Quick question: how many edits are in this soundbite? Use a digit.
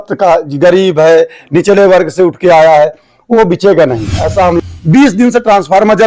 1